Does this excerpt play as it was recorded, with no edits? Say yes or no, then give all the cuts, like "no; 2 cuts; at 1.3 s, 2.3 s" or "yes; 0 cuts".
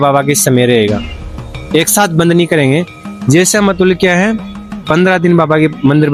yes; 0 cuts